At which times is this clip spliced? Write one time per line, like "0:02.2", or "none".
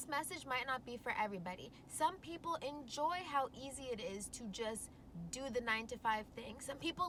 none